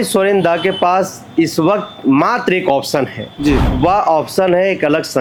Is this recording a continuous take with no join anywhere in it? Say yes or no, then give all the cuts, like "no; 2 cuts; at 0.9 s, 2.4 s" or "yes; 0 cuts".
yes; 0 cuts